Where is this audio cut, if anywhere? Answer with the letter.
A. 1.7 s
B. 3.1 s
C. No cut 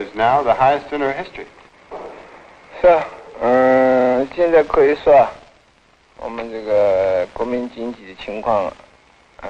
C